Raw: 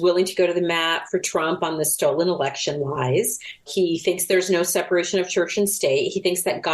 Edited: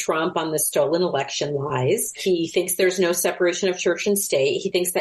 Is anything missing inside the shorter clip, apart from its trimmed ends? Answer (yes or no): yes